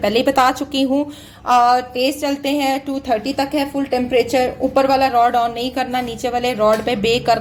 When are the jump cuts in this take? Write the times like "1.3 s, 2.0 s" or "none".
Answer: none